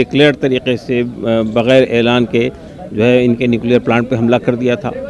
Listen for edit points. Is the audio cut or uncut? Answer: uncut